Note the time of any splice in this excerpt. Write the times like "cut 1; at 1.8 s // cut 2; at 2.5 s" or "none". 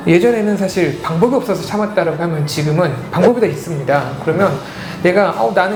none